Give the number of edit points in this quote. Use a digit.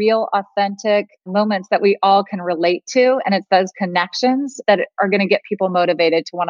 2